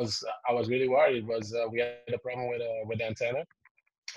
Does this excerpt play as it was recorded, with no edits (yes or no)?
yes